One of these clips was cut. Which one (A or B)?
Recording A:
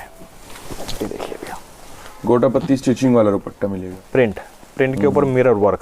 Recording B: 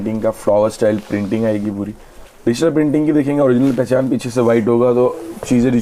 A